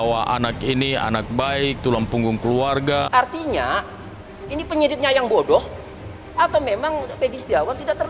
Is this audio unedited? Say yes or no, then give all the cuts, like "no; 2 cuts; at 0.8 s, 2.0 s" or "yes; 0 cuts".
no; 1 cut; at 3.1 s